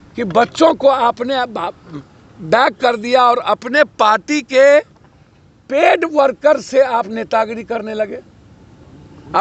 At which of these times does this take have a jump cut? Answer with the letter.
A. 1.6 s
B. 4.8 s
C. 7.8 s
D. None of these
D